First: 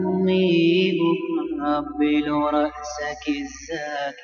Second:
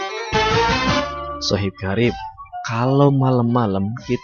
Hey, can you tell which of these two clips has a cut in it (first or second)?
second